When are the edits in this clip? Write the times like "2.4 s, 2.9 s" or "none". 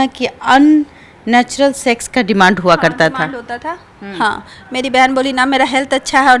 none